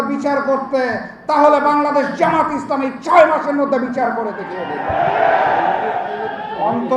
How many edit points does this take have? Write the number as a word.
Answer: zero